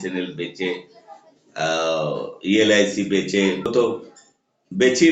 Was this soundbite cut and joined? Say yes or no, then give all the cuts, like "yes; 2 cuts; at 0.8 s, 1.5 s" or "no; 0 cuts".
yes; 1 cut; at 3.7 s